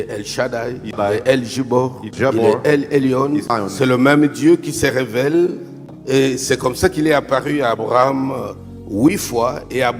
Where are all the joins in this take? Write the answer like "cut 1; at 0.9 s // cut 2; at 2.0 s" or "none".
cut 1; at 1.0 s // cut 2; at 2.1 s // cut 3; at 3.5 s // cut 4; at 5.9 s